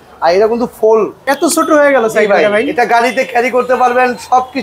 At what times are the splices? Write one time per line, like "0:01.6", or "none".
0:01.2

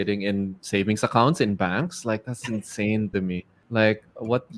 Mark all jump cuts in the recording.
0:03.5

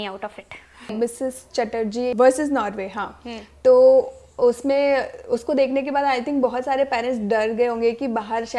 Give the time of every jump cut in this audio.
0:00.9
0:02.1

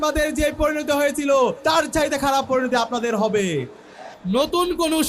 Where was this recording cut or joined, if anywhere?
0:01.6
0:04.1

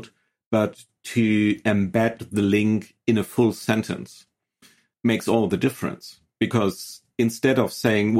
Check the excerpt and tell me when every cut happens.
0:04.9
0:06.2

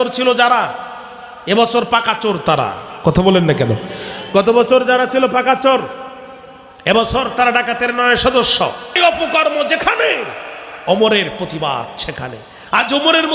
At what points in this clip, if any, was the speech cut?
0:09.0

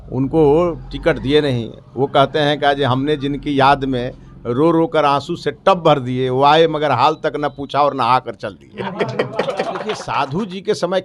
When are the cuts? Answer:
0:09.8

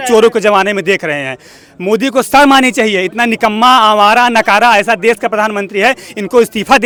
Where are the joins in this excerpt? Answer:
none

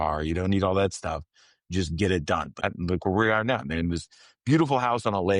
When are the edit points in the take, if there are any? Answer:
0:02.5

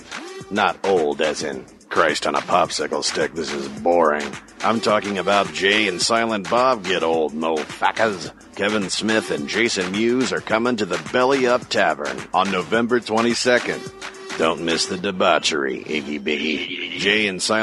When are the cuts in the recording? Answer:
0:05.3

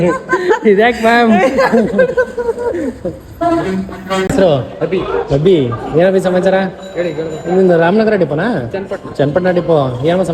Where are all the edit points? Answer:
0:04.3

